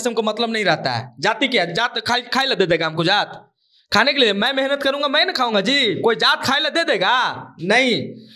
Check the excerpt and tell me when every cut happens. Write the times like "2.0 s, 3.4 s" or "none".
none